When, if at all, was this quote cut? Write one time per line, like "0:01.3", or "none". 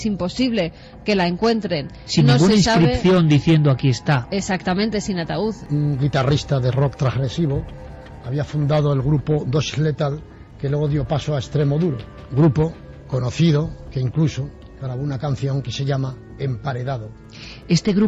0:05.7
0:12.1